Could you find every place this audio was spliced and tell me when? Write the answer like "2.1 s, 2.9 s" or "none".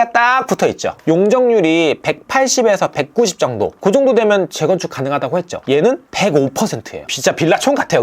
1.0 s, 6.9 s